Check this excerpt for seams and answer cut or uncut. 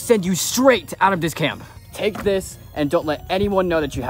cut